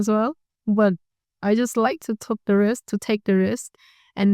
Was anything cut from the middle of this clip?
no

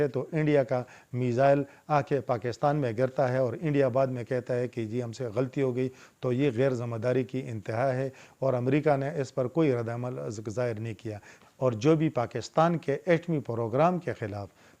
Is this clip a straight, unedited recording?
no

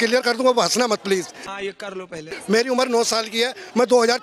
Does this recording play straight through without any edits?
yes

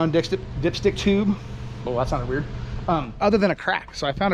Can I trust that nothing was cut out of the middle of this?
no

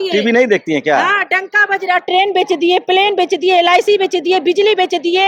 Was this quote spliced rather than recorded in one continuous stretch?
no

